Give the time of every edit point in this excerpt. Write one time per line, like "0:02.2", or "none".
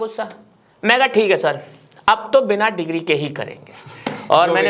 none